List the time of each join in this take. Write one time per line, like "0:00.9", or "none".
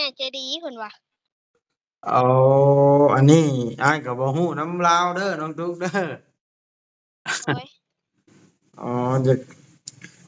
none